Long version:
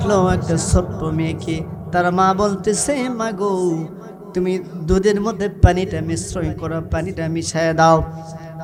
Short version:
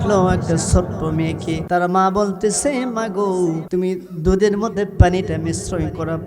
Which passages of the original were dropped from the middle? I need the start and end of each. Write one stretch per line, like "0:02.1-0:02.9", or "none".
0:01.6-0:01.9
0:03.9-0:04.3